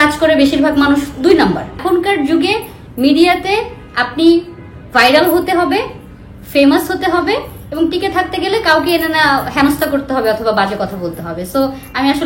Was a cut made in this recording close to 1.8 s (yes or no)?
yes